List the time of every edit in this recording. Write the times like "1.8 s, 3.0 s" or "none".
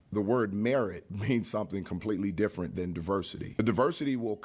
1.1 s, 3.6 s